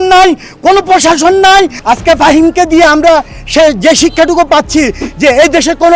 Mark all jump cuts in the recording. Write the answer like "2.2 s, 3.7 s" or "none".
1.8 s

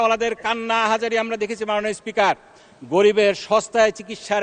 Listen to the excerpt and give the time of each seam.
none

